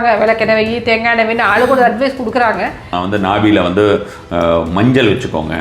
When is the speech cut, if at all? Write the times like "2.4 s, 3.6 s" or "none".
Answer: 2.9 s